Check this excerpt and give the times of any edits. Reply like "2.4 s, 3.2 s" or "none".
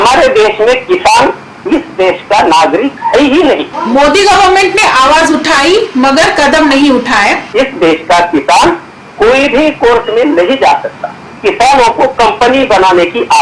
3.7 s, 7.4 s, 11.3 s